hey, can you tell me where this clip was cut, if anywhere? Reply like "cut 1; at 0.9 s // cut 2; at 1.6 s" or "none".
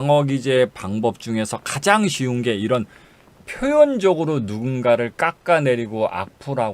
none